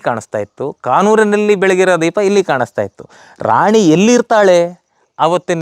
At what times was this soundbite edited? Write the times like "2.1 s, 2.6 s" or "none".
none